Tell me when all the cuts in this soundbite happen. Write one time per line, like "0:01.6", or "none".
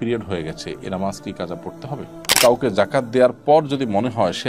0:02.2